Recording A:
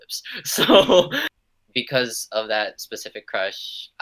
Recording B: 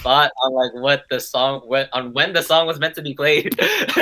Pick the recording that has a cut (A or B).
A